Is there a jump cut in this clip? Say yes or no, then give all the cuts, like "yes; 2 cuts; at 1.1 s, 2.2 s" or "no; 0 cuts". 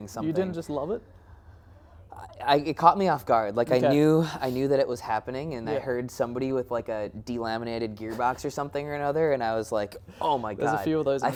no; 0 cuts